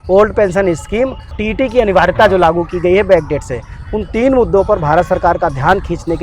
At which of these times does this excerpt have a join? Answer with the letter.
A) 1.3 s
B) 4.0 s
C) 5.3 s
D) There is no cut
A